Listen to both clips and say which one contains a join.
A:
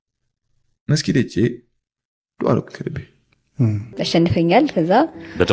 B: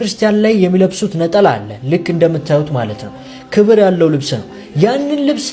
A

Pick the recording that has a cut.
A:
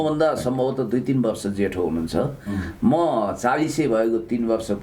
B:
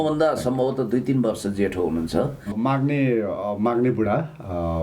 B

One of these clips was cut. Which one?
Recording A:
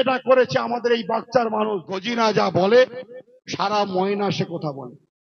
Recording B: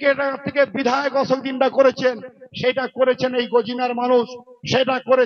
A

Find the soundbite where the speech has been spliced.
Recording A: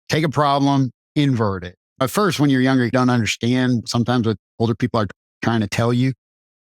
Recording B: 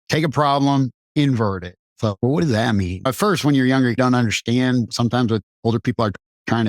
A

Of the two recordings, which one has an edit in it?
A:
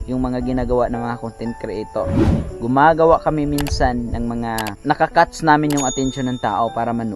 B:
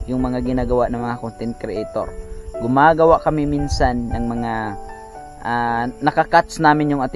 A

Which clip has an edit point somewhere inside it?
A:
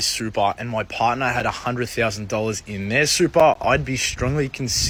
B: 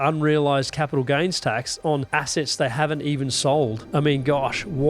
B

